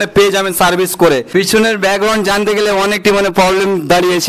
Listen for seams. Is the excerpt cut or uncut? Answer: cut